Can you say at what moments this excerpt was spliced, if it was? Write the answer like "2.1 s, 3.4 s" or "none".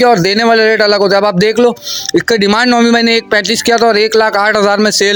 none